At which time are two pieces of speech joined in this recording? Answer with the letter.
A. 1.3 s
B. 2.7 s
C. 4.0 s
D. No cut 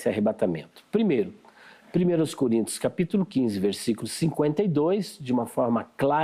D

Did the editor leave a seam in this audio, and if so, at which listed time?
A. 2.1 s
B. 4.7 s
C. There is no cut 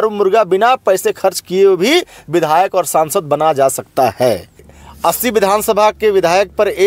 B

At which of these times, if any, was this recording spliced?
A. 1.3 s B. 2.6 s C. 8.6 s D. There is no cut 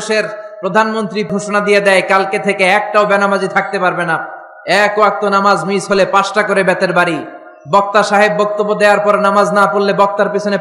A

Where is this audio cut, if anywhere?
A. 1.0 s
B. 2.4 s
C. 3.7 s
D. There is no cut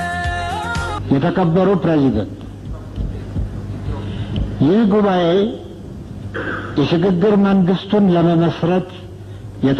A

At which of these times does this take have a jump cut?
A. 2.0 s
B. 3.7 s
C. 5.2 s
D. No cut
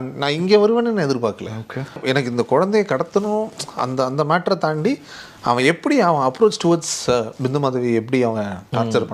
A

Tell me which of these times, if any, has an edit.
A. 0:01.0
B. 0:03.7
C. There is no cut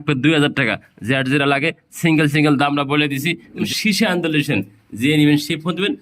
B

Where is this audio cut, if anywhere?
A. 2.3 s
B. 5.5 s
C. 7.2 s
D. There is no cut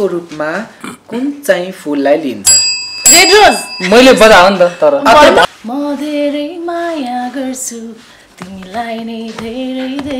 B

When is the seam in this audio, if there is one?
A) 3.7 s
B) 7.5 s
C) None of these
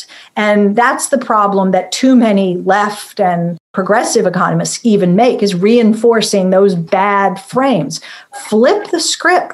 A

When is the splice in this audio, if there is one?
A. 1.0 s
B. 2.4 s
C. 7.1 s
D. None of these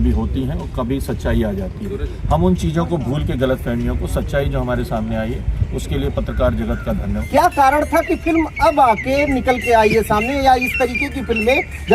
C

